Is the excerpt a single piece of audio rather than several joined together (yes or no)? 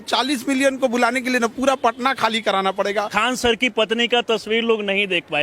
no